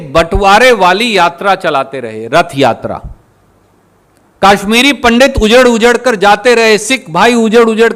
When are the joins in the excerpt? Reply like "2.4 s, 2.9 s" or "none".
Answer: none